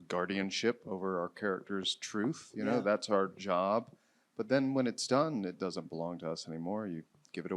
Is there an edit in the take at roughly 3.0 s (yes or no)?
no